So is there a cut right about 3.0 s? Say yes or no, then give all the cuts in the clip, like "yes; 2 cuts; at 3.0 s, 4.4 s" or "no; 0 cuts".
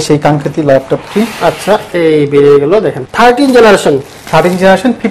yes; 1 cut; at 3.0 s